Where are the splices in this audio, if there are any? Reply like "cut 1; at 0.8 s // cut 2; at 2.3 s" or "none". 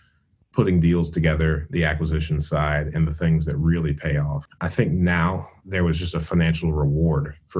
cut 1; at 4.4 s // cut 2; at 5.5 s